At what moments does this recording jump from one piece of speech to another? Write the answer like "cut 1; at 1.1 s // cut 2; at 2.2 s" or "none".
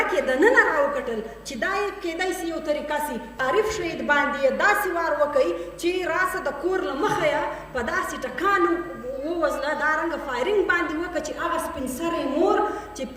cut 1; at 3.4 s